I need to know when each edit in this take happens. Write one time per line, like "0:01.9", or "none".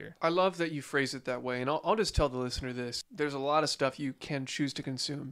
0:03.0

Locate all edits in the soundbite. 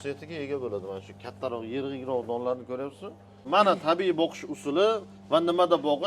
0:03.5

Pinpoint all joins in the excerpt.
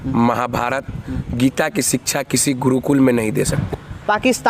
0:03.6

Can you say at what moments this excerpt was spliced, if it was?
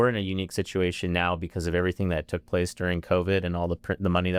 none

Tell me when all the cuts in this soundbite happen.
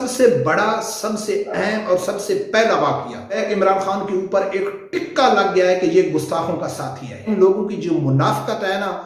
0:03.4
0:07.2

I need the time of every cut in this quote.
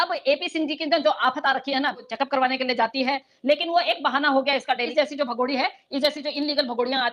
0:02.1
0:04.9

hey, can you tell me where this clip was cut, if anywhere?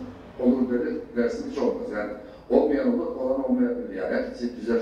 none

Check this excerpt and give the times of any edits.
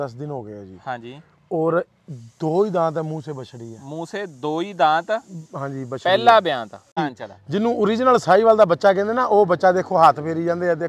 0:07.1

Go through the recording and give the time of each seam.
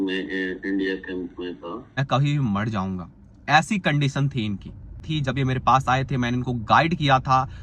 0:01.8
0:05.0

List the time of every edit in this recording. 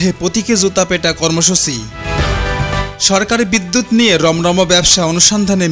0:01.9
0:02.9

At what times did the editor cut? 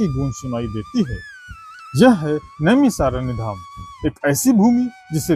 none

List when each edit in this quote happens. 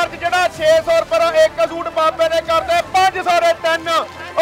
none

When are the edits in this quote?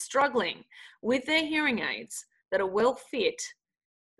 none

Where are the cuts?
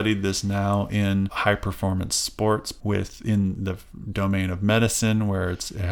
0:01.3
0:02.7

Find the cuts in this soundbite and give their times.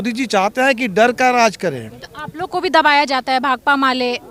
none

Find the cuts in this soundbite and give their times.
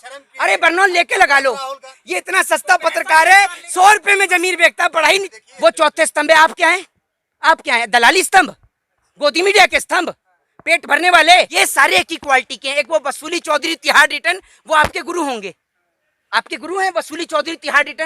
0:01.9
0:05.3
0:11.5

